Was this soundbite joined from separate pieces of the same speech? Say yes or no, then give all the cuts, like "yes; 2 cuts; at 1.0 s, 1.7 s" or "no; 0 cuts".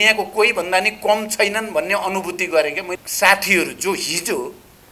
yes; 1 cut; at 3.0 s